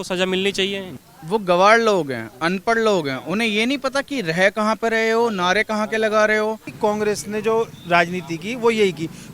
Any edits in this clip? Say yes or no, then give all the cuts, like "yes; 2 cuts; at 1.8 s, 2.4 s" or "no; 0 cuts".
yes; 2 cuts; at 0.9 s, 6.7 s